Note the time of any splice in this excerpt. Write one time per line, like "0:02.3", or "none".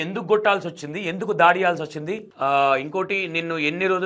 none